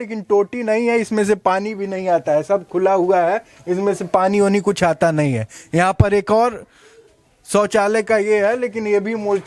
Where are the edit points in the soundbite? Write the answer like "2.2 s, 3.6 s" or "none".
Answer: none